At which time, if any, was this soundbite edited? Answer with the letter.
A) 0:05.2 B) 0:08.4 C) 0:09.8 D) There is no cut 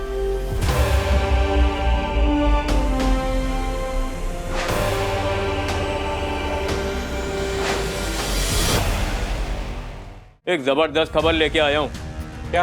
C